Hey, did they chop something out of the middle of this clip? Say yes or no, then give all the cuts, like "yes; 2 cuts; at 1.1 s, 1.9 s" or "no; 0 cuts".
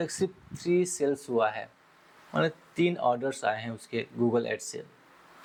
no; 0 cuts